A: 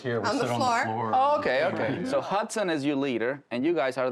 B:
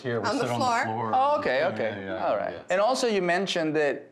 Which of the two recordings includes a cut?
A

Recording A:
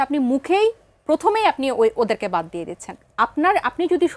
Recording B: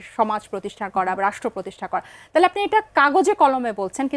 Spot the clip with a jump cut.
A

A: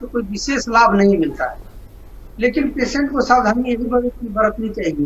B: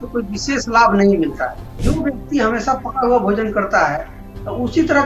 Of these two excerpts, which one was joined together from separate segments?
B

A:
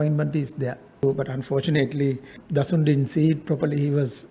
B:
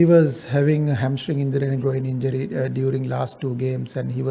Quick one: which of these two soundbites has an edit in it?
A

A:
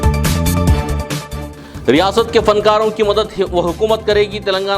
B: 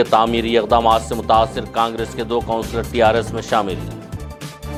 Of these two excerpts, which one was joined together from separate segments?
A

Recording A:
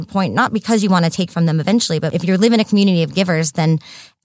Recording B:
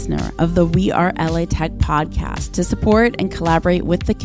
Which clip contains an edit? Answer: A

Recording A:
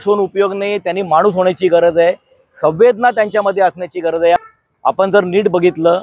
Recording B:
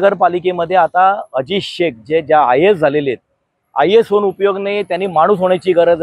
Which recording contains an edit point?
A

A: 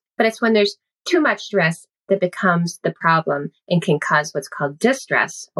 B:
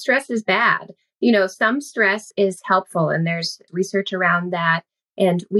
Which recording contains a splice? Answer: B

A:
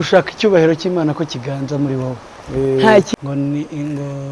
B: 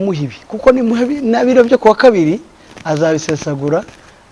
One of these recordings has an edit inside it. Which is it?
A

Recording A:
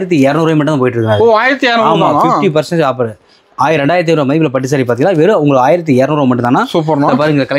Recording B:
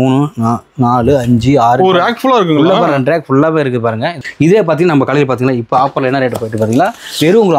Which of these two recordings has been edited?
B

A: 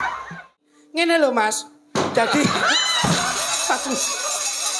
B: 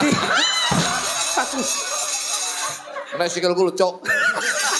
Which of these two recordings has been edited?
A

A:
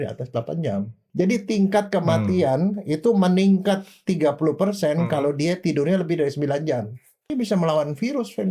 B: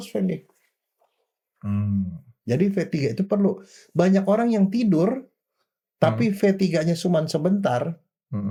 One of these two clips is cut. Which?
A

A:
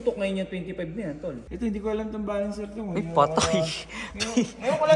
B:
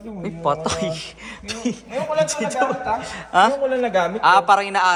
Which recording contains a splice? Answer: A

